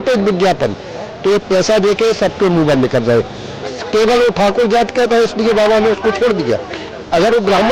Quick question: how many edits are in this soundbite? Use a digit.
1